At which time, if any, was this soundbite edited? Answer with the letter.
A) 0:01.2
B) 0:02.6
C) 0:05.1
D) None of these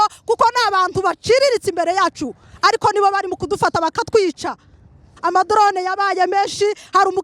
C